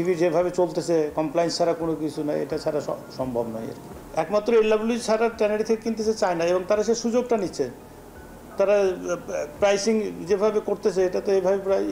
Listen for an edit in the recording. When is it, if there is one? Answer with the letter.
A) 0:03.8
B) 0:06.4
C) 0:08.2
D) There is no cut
D